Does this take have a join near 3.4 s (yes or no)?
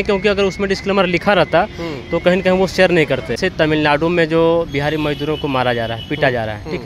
yes